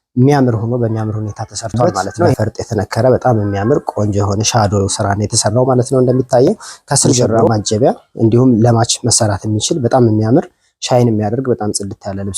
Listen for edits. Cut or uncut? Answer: cut